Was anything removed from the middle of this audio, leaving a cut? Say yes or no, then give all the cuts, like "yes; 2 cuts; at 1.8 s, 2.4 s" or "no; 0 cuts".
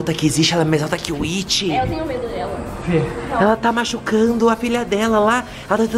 no; 0 cuts